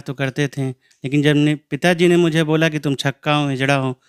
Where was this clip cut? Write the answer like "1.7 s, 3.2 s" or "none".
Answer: none